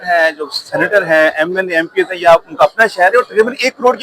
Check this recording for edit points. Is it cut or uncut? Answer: uncut